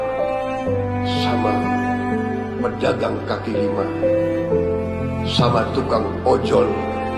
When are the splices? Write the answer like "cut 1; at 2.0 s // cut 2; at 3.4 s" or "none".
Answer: none